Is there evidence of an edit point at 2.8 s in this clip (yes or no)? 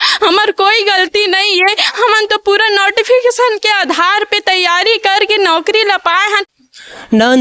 no